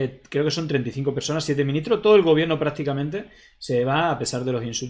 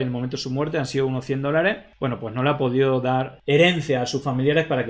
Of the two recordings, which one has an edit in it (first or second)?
second